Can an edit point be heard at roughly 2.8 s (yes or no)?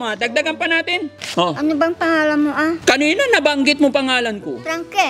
yes